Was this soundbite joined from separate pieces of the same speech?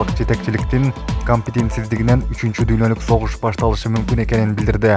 no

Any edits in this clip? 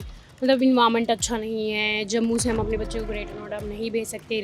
no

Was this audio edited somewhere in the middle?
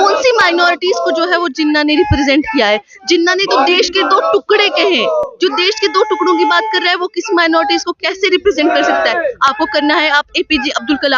no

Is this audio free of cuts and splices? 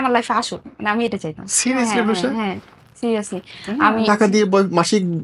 no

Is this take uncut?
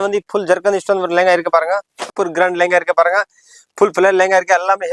no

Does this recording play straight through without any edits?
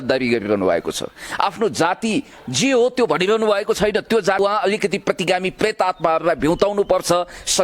no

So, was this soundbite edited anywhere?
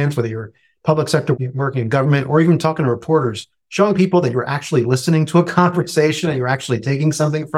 yes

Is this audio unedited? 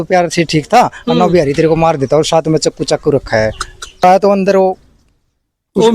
no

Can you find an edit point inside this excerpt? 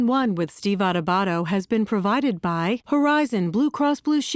yes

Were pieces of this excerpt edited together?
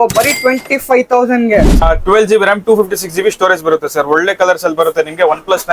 yes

